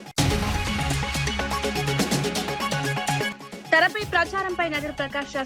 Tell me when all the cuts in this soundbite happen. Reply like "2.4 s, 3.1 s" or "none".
1.5 s, 2.9 s